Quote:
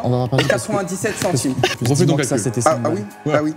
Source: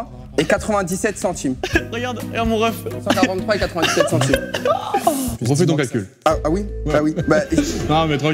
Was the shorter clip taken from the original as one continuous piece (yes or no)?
no